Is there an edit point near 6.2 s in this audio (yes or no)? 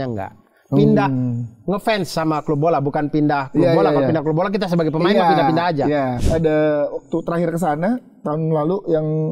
yes